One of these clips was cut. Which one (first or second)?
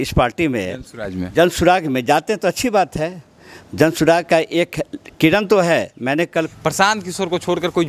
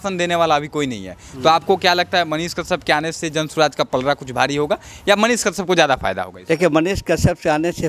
first